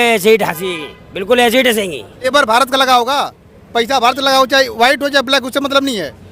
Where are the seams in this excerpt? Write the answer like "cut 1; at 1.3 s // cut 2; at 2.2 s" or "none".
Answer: cut 1; at 2.3 s